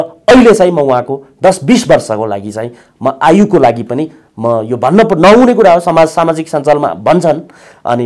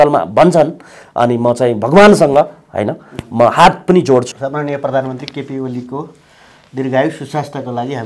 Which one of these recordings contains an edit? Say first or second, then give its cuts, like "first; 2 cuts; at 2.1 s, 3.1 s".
second; 1 cut; at 4.4 s